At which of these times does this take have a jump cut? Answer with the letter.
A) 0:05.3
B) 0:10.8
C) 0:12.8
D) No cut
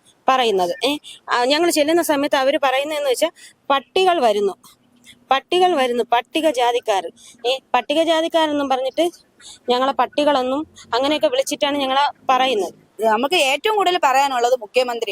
C